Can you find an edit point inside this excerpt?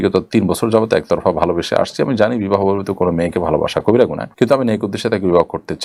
no; 0 cuts

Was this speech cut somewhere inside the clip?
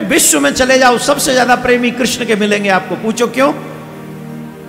no; 0 cuts

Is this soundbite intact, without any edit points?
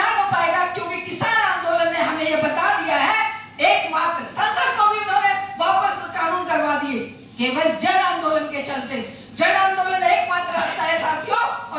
yes; 0 cuts

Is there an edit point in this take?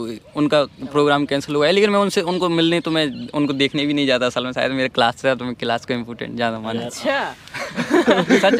no; 0 cuts

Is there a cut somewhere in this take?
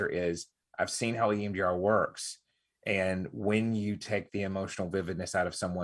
no; 0 cuts

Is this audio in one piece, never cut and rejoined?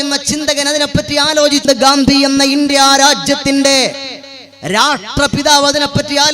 no; 1 cut; at 1.6 s

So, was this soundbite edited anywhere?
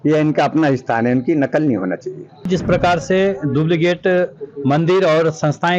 yes; 1 cut; at 2.4 s

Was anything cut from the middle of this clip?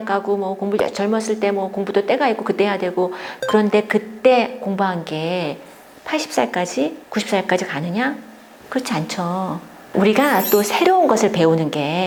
no; 0 cuts

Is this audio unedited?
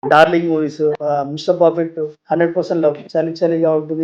no; 3 cuts; at 1.0 s, 2.2 s, 3.0 s

